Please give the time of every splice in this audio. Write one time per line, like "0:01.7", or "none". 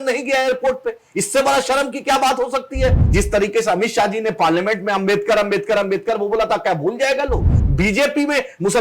0:03.0
0:07.5